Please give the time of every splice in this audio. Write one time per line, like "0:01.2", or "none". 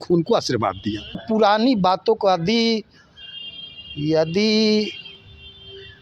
0:01.2